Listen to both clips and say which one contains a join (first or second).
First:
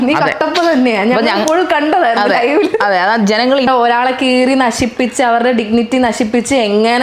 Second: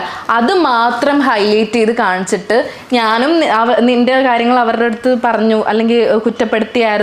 first